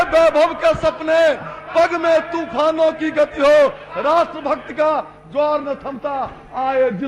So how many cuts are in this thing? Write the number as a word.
zero